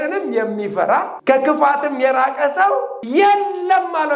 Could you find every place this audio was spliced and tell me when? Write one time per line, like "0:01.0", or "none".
0:01.1
0:03.0